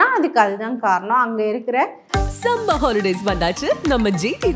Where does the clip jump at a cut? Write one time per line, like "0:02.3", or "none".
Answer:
0:02.0